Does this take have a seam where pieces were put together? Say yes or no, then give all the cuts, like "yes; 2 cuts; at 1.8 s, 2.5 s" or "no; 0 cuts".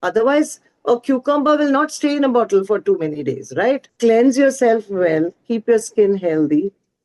yes; 1 cut; at 3.9 s